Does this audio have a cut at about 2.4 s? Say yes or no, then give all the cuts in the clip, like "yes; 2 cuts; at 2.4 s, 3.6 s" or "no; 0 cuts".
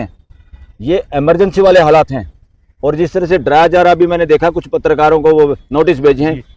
no; 0 cuts